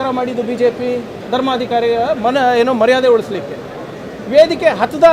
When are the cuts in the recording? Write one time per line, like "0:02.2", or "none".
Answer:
0:01.2